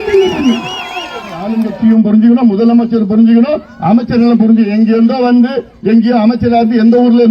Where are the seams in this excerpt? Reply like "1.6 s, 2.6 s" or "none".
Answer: 1.5 s